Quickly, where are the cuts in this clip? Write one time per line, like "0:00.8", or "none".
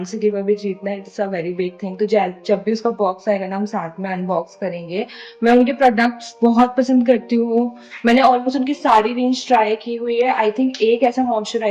none